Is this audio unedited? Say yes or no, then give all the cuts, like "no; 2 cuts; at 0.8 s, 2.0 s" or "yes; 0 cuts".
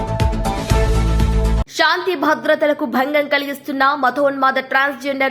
no; 1 cut; at 1.6 s